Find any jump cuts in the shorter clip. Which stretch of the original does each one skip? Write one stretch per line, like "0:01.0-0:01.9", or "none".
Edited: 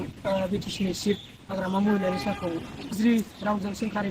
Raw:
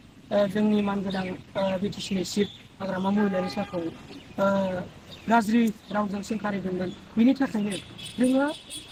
0:04.3-0:05.4